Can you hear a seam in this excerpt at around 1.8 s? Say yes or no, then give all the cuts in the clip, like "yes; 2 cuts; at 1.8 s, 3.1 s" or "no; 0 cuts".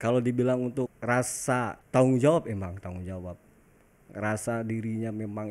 yes; 2 cuts; at 1.0 s, 1.8 s